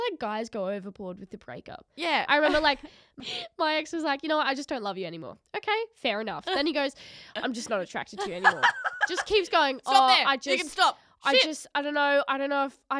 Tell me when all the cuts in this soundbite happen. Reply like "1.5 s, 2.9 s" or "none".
3.1 s